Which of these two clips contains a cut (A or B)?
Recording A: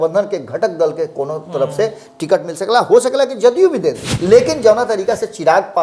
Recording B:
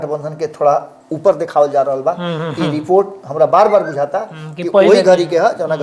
A